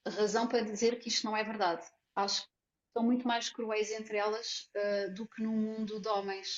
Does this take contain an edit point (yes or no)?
yes